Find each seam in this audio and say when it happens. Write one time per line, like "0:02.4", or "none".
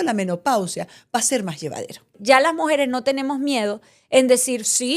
0:02.2